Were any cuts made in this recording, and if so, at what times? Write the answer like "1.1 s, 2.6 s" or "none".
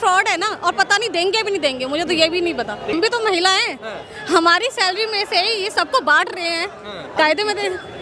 2.9 s